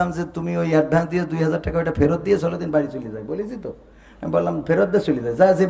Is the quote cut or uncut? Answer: uncut